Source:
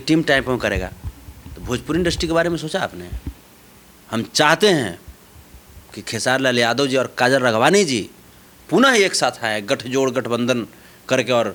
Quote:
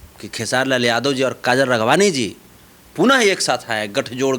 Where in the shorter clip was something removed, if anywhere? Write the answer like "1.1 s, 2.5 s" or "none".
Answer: none

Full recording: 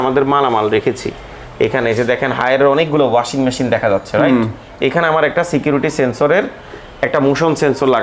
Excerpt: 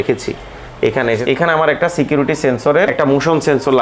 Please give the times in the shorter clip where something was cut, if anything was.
1.2 s, 2.9 s

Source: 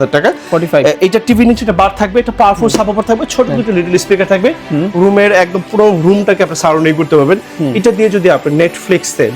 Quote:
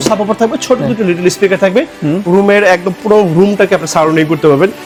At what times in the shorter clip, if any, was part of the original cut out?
none

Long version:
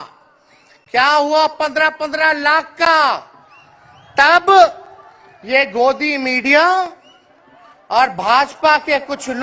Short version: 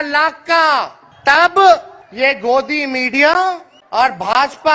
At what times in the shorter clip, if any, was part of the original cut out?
1.0 s, 2.0 s, 3.7 s

